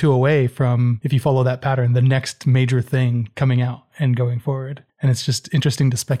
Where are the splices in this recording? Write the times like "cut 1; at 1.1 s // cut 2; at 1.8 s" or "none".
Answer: cut 1; at 1.0 s // cut 2; at 3.3 s // cut 3; at 4.8 s